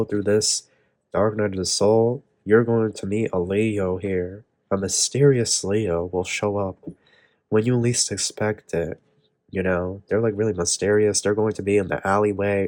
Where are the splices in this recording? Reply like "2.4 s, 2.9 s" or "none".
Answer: none